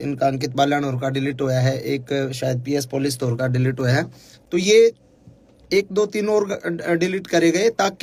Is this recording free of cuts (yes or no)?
yes